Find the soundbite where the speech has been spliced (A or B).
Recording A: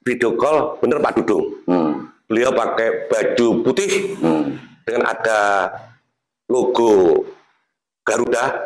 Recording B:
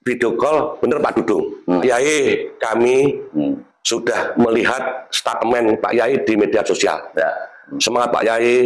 B